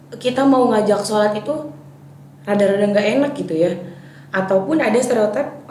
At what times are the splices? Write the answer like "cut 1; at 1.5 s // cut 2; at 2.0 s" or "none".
none